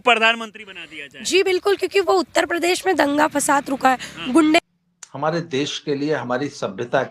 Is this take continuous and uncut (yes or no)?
no